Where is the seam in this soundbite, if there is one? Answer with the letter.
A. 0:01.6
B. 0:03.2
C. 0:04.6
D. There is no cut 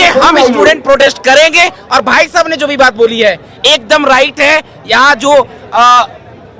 D